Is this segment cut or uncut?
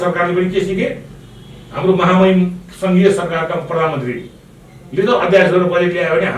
uncut